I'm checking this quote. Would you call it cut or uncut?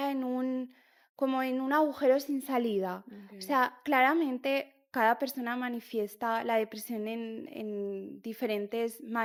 uncut